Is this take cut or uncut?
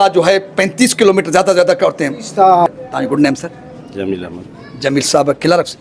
cut